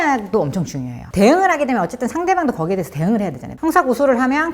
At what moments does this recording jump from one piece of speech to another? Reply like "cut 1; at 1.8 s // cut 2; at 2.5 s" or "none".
cut 1; at 1.0 s // cut 2; at 3.4 s